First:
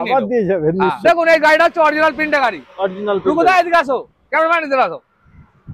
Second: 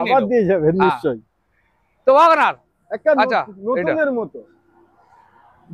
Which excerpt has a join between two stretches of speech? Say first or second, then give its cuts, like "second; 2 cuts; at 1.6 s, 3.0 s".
first; 1 cut; at 1.0 s